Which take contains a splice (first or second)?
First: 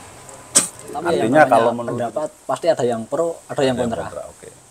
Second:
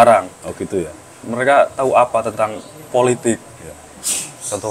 first